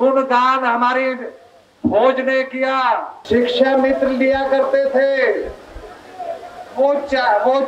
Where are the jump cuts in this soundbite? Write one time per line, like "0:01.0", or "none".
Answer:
0:03.1